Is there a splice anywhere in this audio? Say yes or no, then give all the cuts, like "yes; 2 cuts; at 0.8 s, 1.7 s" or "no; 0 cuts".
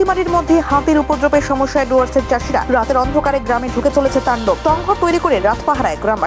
no; 0 cuts